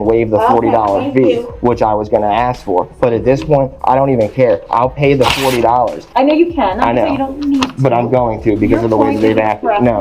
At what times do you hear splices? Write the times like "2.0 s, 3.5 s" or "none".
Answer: 6.0 s